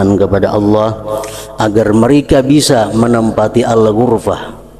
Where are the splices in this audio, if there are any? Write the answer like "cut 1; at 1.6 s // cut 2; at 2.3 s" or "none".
none